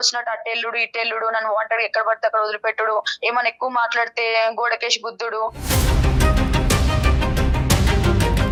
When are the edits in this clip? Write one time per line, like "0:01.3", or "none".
none